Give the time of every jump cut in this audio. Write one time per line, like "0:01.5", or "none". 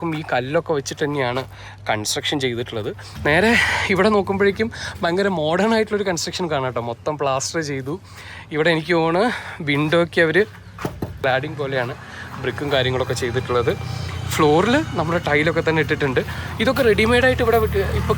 0:03.1
0:11.1